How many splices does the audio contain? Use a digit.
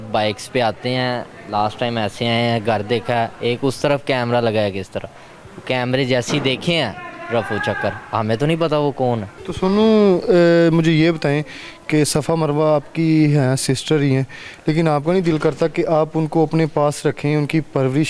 0